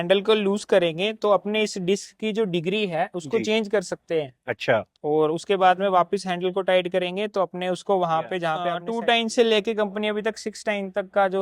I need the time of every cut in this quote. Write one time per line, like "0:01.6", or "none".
0:08.8